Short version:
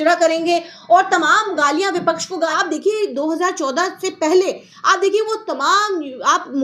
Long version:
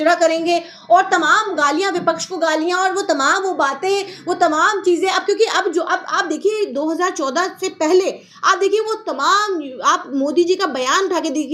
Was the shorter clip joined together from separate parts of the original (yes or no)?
yes